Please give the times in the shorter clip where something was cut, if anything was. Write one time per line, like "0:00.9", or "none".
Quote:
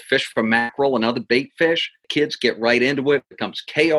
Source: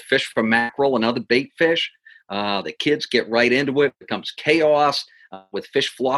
0:02.0